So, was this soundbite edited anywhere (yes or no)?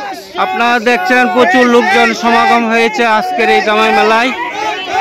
no